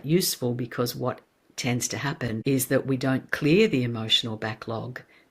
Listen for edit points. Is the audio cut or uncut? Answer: cut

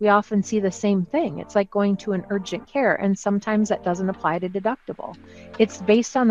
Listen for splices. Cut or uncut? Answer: uncut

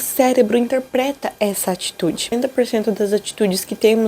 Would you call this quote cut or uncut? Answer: cut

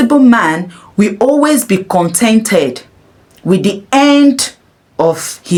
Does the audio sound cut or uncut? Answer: uncut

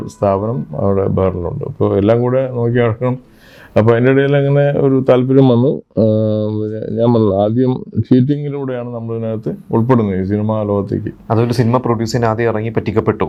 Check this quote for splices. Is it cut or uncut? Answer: uncut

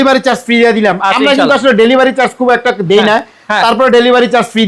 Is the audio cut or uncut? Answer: uncut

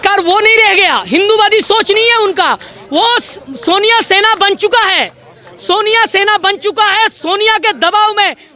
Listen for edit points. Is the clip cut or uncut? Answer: uncut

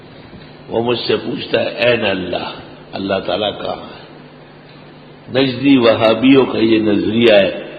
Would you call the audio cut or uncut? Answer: uncut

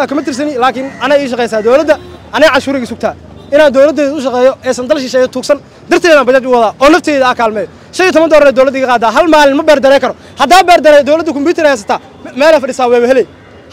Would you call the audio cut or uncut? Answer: uncut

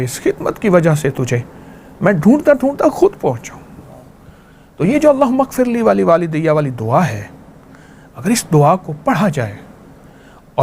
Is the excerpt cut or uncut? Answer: uncut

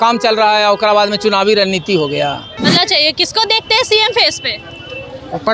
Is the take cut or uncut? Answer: cut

